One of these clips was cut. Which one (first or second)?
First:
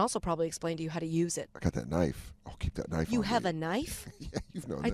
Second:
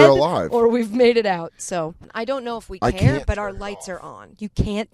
second